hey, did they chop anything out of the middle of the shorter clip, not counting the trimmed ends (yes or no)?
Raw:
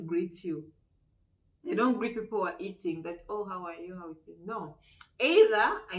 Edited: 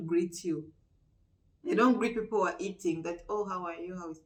no